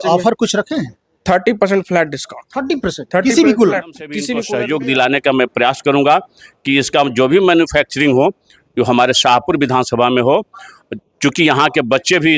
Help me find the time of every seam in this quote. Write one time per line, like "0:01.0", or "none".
0:04.3